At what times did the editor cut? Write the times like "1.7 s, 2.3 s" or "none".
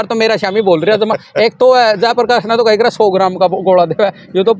none